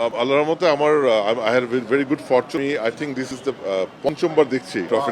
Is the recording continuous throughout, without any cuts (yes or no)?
yes